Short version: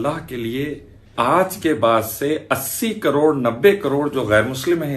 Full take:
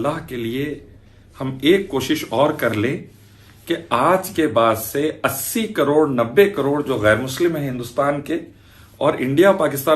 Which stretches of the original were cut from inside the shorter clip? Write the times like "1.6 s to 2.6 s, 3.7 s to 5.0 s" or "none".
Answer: 1.1 s to 3.8 s